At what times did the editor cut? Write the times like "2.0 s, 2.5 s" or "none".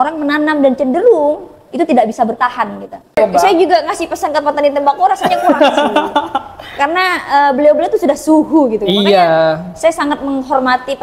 3.2 s